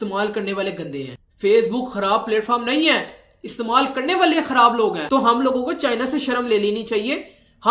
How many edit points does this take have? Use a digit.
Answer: 1